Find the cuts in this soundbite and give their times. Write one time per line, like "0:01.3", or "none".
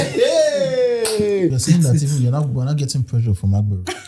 0:01.6